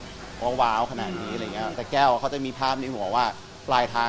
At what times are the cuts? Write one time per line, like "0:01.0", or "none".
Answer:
0:01.8